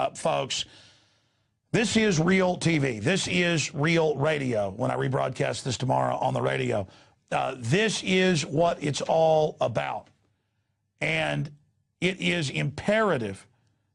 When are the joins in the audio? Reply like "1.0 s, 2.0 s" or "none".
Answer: none